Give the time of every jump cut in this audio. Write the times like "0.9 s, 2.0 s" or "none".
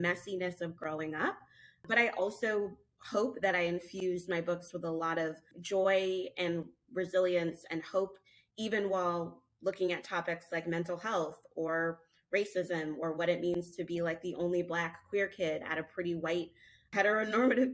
1.9 s, 16.9 s